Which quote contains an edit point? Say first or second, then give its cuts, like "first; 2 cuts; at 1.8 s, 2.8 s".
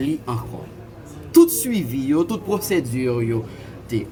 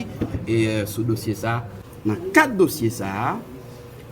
second; 1 cut; at 1.7 s